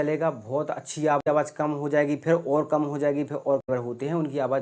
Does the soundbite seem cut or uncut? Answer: cut